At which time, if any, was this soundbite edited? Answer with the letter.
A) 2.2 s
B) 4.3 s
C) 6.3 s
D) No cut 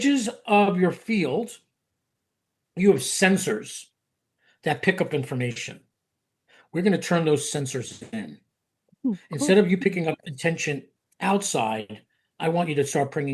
D